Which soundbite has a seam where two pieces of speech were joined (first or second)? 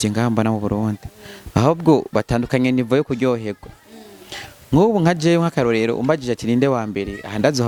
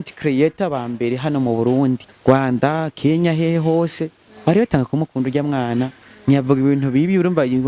second